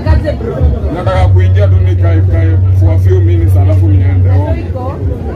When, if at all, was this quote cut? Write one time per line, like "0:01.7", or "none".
none